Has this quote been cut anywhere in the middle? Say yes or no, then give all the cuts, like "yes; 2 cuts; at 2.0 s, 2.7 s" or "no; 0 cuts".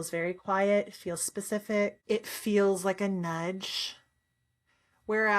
yes; 1 cut; at 2.0 s